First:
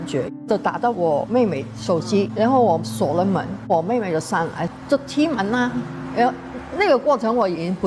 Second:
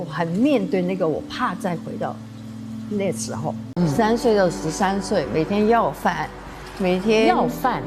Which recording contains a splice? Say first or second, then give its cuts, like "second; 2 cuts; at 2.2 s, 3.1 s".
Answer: second; 1 cut; at 3.7 s